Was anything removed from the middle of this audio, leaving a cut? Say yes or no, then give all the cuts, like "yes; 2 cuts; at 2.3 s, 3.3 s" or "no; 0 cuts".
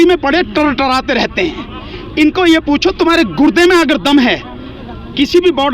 no; 0 cuts